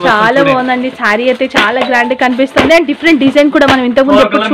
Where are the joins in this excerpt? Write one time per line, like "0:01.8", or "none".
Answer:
none